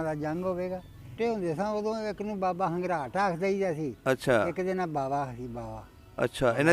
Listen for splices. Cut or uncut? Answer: cut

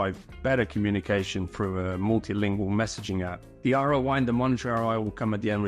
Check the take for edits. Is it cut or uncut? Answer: uncut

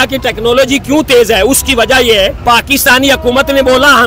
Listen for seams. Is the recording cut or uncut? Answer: cut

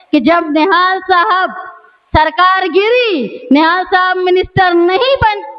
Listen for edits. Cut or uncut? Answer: uncut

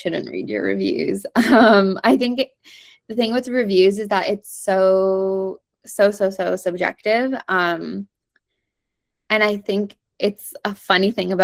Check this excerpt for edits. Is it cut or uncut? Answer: uncut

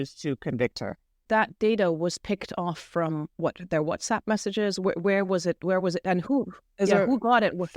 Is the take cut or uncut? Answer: uncut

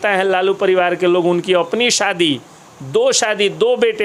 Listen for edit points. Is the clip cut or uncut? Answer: uncut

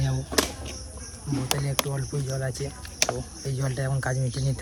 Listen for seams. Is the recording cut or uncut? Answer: uncut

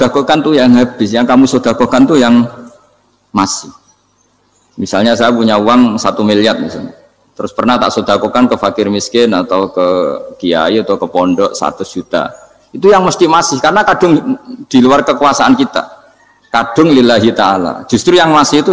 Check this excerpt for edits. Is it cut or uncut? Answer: uncut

